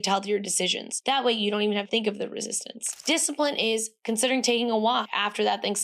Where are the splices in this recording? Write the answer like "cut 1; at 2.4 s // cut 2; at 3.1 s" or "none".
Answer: cut 1; at 2.9 s

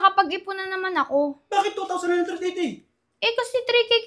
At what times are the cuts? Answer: cut 1; at 1.4 s

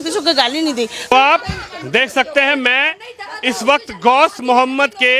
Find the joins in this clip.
cut 1; at 1.1 s

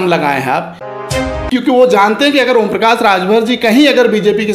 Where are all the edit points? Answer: cut 1; at 1.0 s

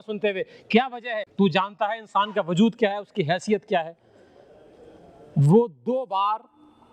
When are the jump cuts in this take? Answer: cut 1; at 1.2 s

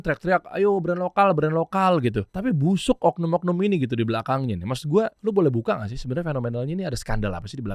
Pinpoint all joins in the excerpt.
cut 1; at 2.3 s // cut 2; at 5.2 s

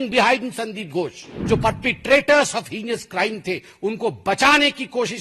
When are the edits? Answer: cut 1; at 1.3 s

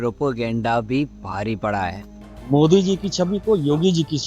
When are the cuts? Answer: cut 1; at 2.2 s

